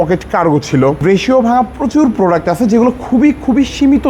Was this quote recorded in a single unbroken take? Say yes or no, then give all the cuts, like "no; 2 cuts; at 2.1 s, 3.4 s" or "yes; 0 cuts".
no; 1 cut; at 1.0 s